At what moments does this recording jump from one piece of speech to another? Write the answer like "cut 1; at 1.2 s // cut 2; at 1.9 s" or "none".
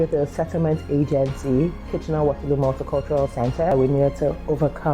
cut 1; at 3.7 s